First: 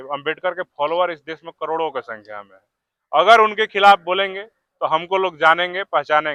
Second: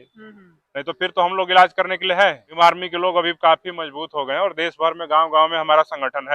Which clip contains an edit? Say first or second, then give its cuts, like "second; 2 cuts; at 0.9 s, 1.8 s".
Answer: second; 1 cut; at 2.4 s